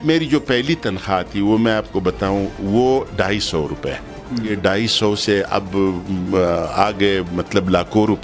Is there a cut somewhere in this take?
yes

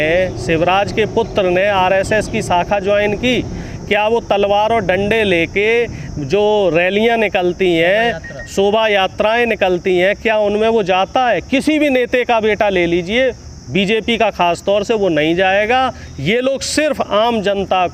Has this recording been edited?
no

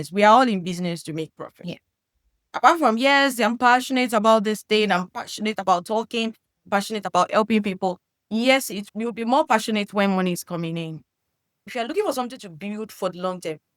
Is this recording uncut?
no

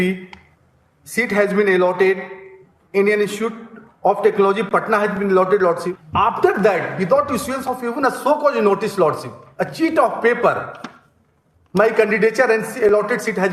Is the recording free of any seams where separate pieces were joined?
no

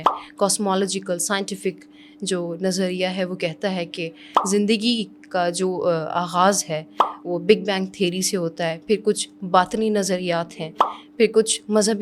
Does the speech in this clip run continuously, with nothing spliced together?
yes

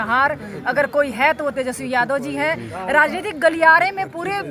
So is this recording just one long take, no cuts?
yes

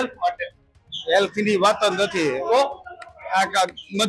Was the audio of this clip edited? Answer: no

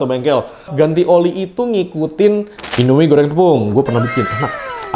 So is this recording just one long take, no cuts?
no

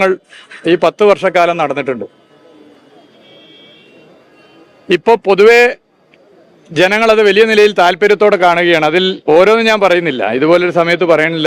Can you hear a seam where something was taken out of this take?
no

